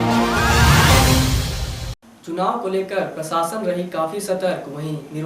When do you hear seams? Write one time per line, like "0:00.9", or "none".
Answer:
0:02.1